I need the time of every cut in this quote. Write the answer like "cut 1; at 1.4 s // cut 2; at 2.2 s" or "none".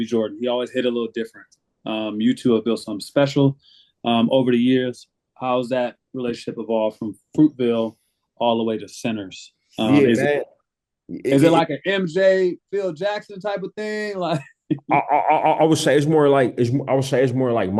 none